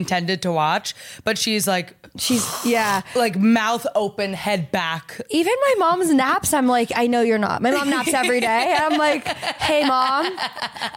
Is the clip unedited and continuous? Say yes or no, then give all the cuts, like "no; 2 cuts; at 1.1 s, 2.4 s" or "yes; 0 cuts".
yes; 0 cuts